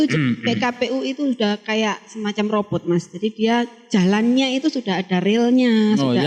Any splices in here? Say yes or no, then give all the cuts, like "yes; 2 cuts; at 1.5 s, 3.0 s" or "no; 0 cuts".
no; 0 cuts